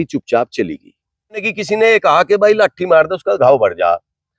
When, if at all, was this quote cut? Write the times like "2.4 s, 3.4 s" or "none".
1.5 s